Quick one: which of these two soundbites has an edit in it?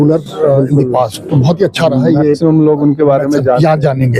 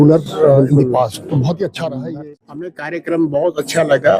second; 1 cut; at 2.0 s

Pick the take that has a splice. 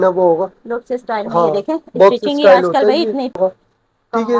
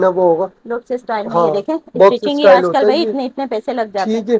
first; 1 cut; at 3.4 s

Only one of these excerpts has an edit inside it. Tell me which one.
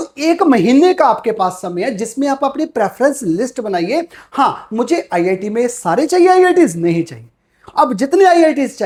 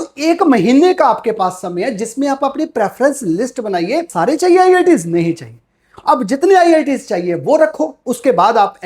second; 1 cut; at 4.1 s

